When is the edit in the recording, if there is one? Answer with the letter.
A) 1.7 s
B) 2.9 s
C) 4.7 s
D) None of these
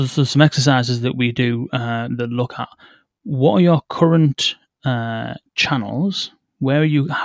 D